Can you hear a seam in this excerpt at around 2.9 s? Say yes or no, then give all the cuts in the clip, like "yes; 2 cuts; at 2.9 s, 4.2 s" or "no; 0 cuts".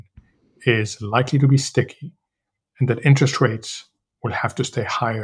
no; 0 cuts